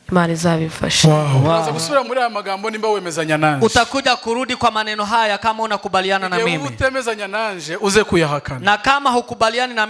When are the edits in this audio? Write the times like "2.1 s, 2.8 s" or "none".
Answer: 1.7 s